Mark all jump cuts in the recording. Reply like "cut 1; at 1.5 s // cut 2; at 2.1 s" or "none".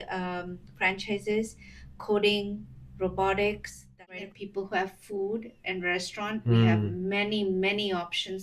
cut 1; at 4.0 s

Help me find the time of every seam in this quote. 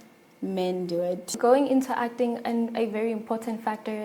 cut 1; at 1.3 s

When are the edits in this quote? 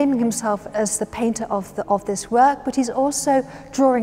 none

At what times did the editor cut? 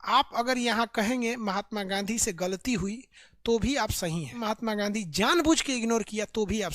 cut 1; at 4.4 s

